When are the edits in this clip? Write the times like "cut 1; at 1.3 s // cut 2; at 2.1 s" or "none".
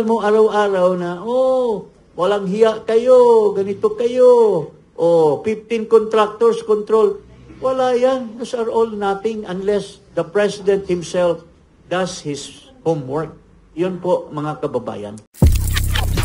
cut 1; at 15.3 s